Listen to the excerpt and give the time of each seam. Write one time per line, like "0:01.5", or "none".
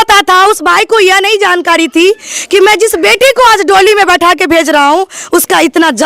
none